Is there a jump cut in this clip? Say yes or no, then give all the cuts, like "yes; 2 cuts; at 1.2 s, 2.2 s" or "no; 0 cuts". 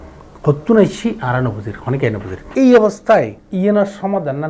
no; 0 cuts